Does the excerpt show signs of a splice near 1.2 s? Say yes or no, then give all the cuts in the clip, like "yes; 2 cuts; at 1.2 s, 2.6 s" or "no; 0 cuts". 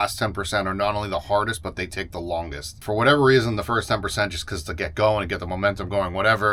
no; 1 cut; at 2.7 s